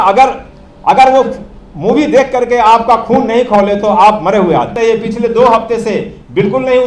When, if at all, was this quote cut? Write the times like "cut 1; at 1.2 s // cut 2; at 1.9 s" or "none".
cut 1; at 4.7 s